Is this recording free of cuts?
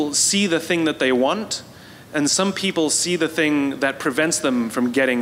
yes; 0 cuts

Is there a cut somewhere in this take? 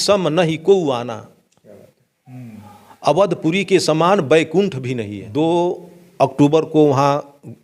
yes; 1 cut; at 5.2 s

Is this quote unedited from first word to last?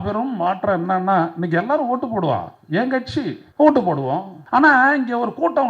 no; 2 cuts; at 3.4 s, 4.3 s

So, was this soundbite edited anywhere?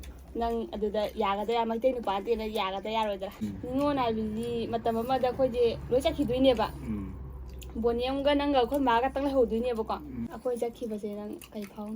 yes; 2 cuts; at 3.4 s, 10.3 s

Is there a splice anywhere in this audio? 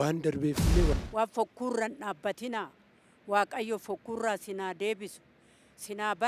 yes; 1 cut; at 0.9 s

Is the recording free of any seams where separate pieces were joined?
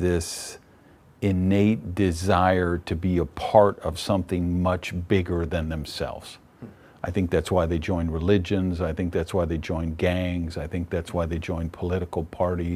yes; 0 cuts

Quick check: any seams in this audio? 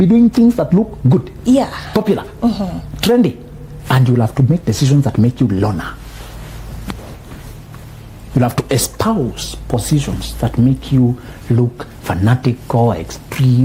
no; 0 cuts

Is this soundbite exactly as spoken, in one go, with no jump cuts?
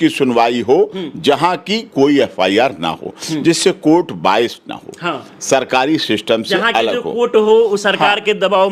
yes; 0 cuts

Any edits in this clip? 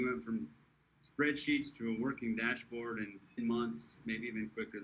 yes; 1 cut; at 3.4 s

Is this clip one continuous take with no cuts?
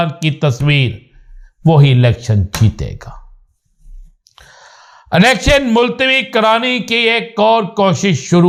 yes; 0 cuts

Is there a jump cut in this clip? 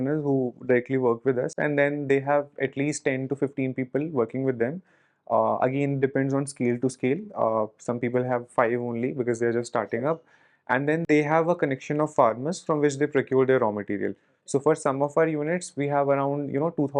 no; 0 cuts

